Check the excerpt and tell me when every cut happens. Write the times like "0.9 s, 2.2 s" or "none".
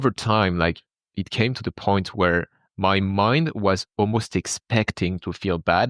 0.9 s

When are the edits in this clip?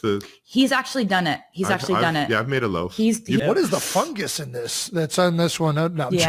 3.4 s

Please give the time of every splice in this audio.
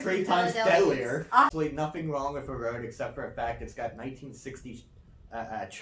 1.5 s

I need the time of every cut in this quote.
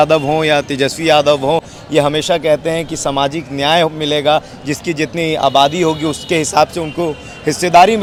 none

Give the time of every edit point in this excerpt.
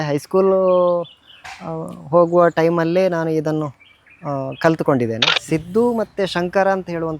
5.3 s

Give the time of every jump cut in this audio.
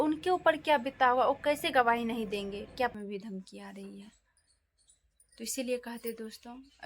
2.9 s

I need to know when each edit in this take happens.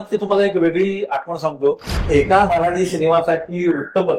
1.9 s

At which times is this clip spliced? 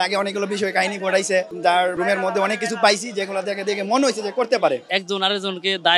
1.9 s, 4.9 s

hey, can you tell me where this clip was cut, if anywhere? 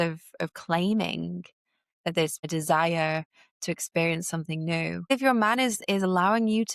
2.5 s, 5.1 s

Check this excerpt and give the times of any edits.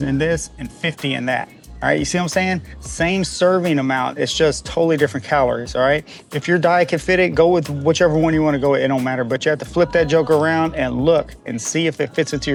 none

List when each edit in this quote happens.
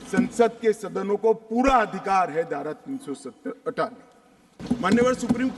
4.6 s

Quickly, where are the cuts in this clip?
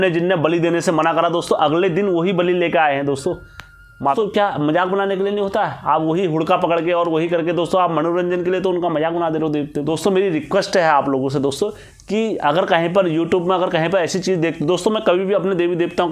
4.1 s, 9.9 s

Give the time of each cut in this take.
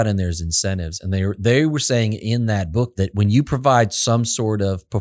2.9 s

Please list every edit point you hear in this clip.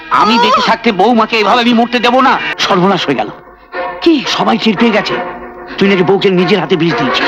2.5 s

